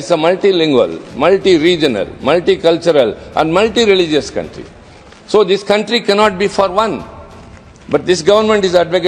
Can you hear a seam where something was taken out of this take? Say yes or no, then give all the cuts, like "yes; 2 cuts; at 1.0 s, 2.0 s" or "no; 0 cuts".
no; 0 cuts